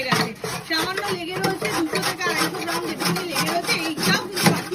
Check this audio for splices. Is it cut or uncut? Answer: uncut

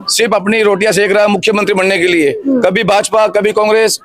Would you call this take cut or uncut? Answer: uncut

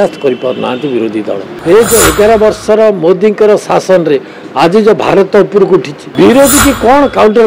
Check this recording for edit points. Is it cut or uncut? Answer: cut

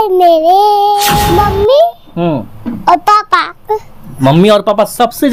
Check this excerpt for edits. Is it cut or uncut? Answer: cut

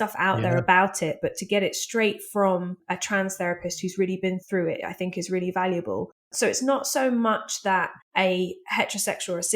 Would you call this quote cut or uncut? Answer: cut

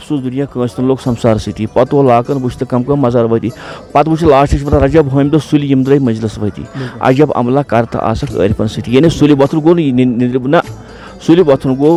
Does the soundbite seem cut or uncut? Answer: uncut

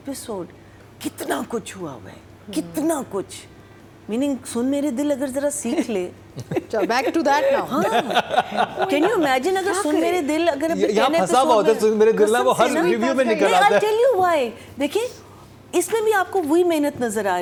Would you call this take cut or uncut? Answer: uncut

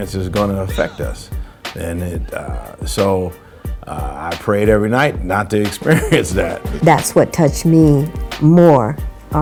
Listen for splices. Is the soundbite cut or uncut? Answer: uncut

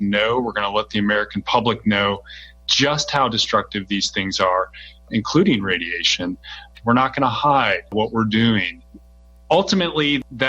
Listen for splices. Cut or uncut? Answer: cut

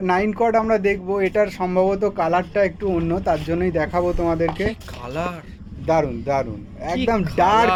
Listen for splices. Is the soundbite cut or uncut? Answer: uncut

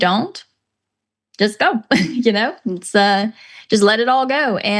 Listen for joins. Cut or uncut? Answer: uncut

